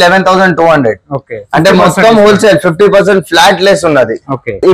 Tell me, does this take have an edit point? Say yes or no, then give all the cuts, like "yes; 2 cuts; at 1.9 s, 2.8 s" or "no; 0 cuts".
no; 0 cuts